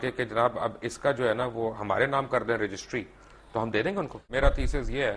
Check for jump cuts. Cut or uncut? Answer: cut